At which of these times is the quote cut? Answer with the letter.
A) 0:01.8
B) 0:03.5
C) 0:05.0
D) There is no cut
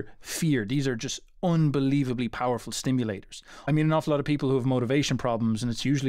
B